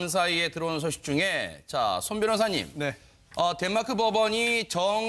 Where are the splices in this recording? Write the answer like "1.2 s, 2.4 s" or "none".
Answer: none

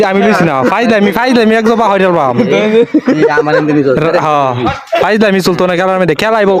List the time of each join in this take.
none

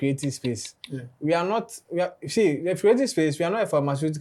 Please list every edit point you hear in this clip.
none

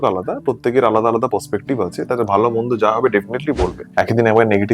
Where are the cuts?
3.8 s

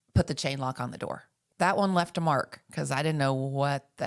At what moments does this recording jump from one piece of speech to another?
1.4 s

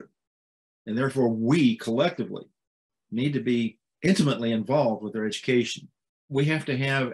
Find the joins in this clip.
6.1 s

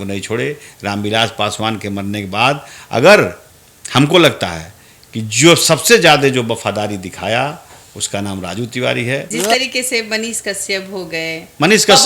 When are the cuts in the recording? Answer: 9.3 s

